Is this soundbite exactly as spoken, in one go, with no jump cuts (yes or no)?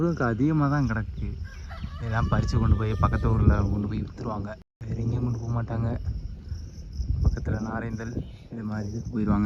yes